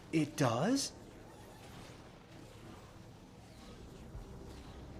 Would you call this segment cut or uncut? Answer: uncut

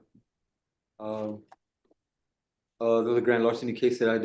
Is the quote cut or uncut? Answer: uncut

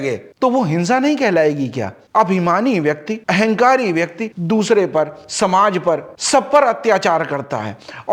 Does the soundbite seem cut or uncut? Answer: uncut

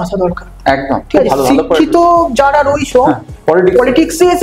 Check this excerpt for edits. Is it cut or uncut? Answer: uncut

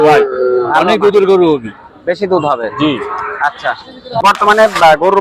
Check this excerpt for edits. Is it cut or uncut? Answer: cut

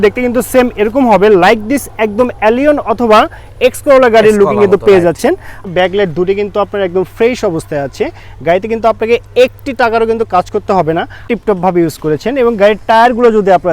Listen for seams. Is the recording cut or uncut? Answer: cut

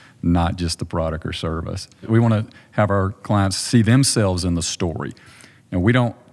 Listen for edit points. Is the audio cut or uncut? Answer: cut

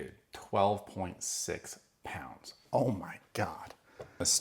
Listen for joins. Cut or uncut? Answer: uncut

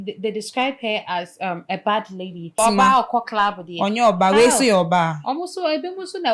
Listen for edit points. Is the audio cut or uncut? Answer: cut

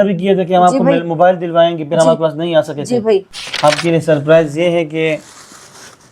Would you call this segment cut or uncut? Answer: cut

